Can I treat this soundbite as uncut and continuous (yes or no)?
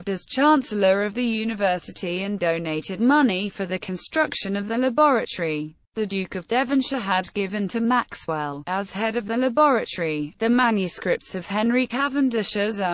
yes